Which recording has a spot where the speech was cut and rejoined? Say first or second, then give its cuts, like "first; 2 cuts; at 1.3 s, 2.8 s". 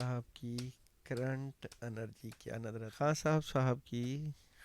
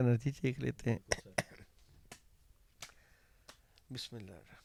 first; 1 cut; at 2.9 s